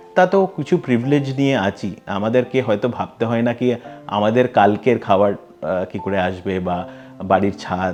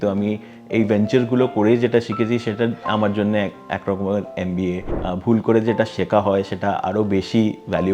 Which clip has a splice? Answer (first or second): second